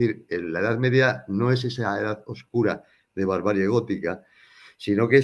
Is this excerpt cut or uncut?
uncut